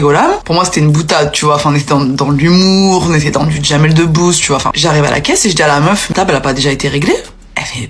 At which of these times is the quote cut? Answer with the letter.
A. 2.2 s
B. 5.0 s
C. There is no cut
B